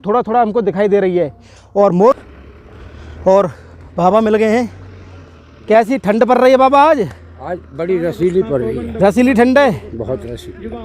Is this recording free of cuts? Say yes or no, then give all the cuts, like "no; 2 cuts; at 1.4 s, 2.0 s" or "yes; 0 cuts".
no; 1 cut; at 2.2 s